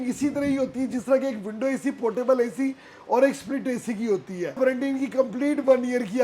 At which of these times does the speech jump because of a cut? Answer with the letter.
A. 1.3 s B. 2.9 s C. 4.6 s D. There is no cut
C